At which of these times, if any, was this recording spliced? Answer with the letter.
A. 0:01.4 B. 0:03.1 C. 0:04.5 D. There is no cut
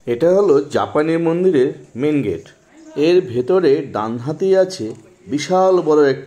B